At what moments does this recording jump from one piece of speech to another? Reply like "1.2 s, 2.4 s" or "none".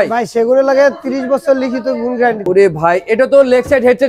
2.4 s